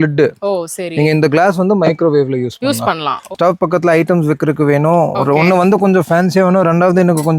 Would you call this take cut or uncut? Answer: cut